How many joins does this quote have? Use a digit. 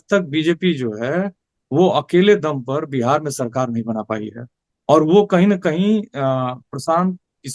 0